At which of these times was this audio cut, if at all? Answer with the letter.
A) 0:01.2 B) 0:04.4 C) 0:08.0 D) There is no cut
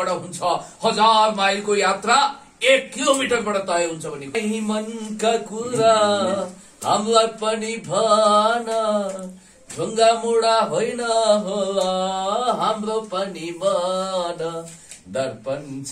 B